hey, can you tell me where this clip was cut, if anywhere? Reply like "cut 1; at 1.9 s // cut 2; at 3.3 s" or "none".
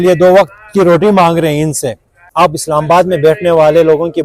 cut 1; at 2.2 s